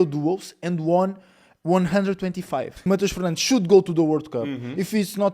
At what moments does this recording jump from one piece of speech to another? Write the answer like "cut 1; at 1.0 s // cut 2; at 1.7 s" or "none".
cut 1; at 2.8 s